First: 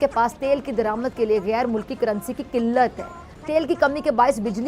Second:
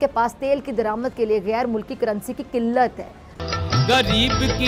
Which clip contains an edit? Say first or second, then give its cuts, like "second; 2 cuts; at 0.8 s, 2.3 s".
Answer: first; 1 cut; at 3.4 s